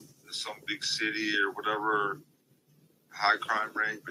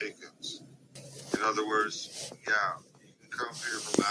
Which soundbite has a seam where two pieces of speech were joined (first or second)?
second